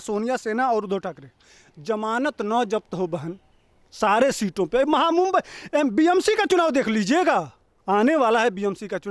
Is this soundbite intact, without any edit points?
yes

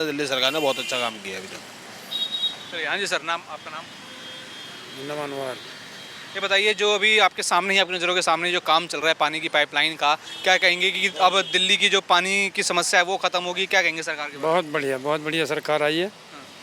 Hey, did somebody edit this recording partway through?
no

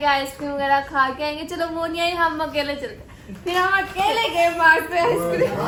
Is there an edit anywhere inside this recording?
no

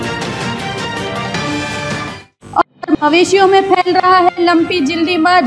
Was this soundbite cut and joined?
no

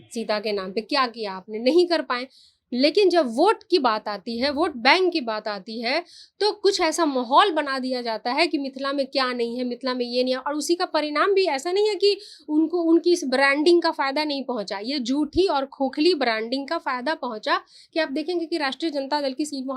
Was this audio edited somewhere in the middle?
no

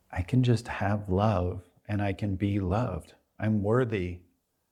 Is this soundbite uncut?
yes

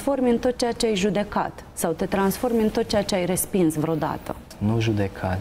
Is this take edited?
yes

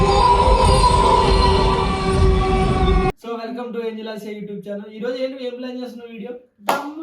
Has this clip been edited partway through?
yes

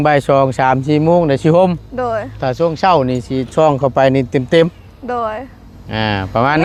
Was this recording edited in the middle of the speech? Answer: no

